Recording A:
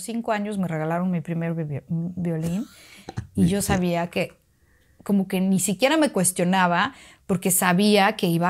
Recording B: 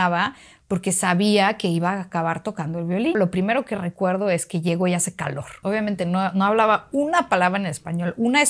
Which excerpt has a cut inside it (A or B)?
B